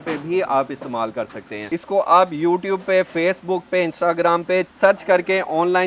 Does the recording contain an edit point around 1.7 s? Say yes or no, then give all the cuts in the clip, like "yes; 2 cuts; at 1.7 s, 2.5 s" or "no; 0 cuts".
yes; 1 cut; at 1.7 s